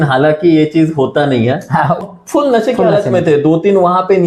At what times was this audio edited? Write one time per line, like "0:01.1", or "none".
0:02.1

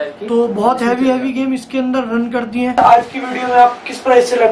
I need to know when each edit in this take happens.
0:02.8

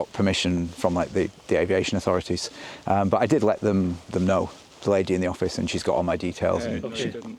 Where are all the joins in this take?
none

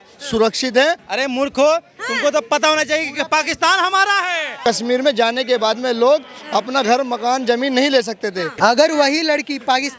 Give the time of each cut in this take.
0:01.0
0:04.6
0:08.5

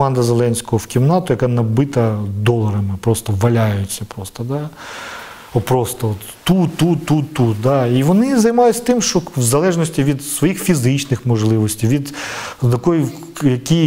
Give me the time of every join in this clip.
none

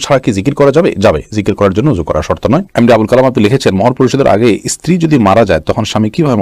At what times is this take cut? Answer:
none

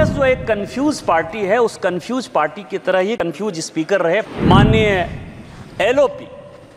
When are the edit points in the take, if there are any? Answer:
0:04.3

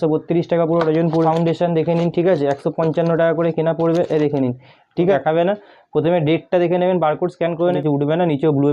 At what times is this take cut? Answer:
0:01.2
0:05.1
0:07.8

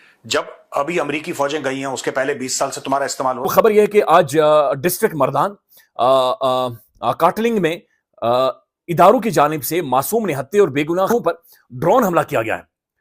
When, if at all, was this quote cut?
0:03.4
0:11.1

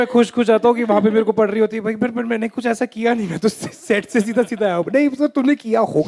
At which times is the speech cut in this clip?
none

